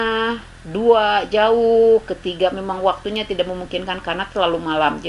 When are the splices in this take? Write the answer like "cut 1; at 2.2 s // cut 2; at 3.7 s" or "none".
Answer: none